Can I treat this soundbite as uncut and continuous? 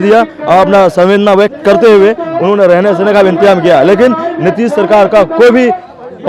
yes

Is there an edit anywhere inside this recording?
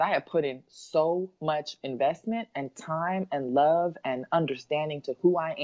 no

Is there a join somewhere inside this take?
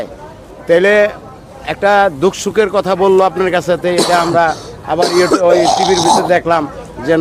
no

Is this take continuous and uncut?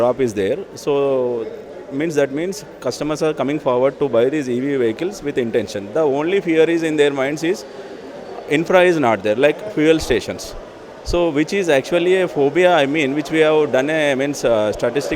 yes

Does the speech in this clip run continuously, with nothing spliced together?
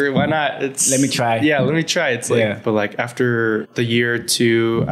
no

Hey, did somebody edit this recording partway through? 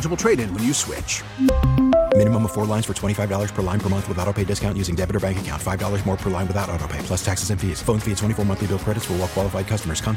no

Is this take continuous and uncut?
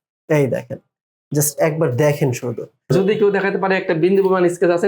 no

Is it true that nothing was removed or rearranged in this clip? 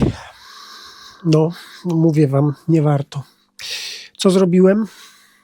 yes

